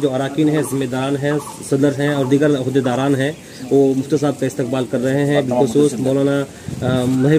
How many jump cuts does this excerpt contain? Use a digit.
0